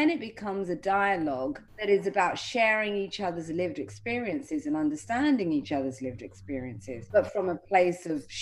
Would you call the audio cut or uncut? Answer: cut